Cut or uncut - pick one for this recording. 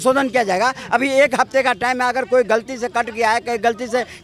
uncut